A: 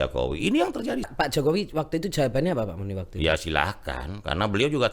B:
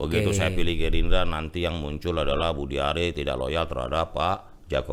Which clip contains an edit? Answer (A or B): A